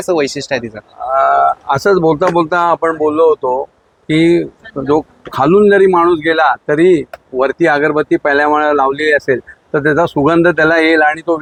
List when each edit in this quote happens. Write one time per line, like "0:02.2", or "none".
none